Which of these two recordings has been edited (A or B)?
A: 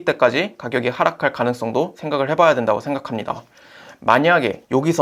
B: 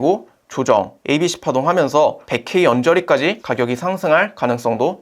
B